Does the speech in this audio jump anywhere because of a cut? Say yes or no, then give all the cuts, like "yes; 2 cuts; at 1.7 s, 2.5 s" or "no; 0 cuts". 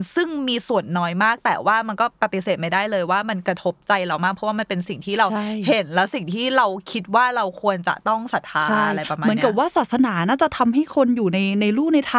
yes; 1 cut; at 2.1 s